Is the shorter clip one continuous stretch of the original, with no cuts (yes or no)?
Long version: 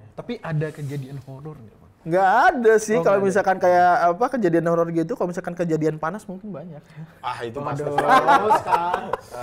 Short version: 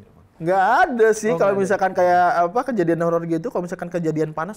yes